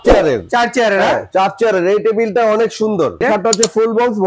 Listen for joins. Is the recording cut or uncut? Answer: cut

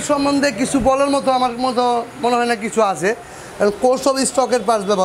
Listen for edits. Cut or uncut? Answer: uncut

